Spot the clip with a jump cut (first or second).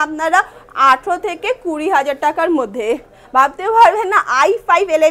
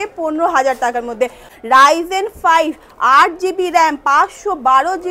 second